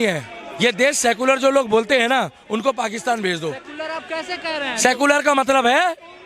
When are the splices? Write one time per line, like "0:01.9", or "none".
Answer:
none